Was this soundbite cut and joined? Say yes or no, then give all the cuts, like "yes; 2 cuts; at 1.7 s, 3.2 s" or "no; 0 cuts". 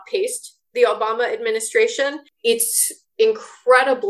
yes; 1 cut; at 2.3 s